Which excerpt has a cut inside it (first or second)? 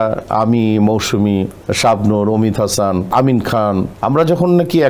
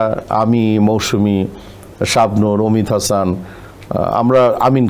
first